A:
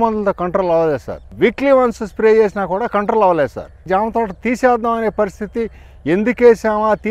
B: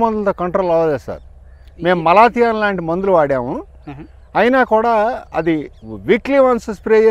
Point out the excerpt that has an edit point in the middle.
A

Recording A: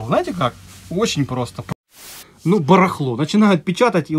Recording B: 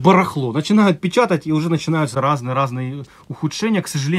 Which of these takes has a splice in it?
A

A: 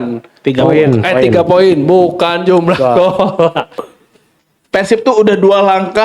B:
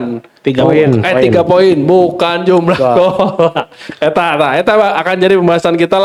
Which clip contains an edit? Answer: A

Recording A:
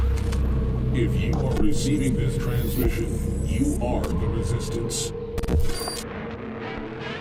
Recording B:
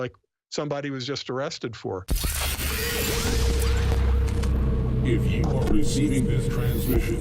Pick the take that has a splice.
B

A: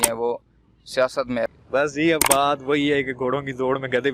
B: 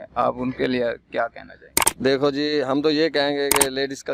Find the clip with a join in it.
A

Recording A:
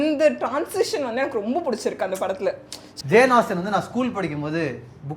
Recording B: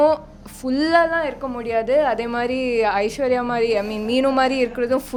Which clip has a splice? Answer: A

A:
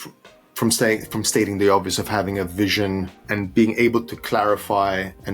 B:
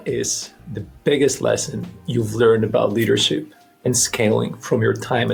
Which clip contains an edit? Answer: A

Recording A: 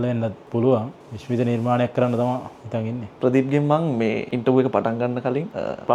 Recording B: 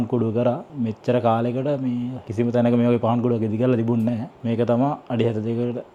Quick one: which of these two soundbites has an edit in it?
A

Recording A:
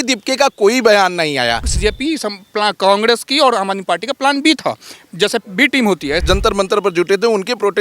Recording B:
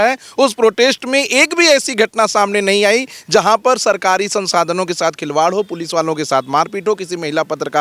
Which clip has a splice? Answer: A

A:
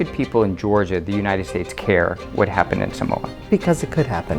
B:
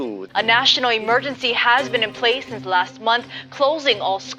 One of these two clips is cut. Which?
A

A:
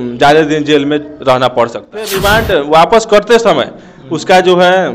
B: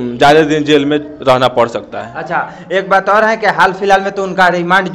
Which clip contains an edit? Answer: A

